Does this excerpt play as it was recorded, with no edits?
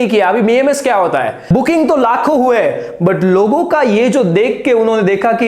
no; 1 cut; at 1.4 s

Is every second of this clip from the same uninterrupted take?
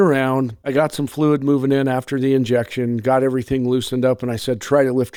yes; 0 cuts

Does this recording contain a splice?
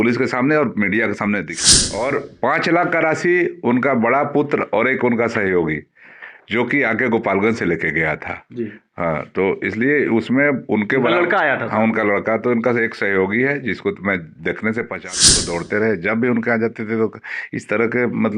yes; 2 cuts; at 1.5 s, 15.2 s

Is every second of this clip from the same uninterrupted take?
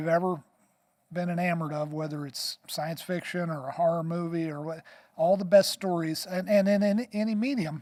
yes; 0 cuts

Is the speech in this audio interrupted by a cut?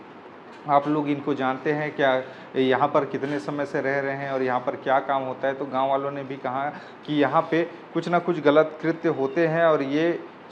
no; 0 cuts

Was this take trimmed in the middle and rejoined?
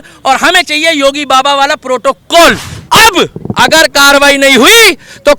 yes; 1 cut; at 2.7 s

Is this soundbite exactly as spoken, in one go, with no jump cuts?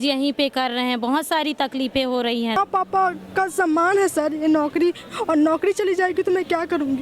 no; 1 cut; at 2.6 s

